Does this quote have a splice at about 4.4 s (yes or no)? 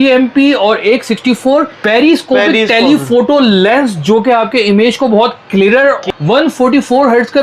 no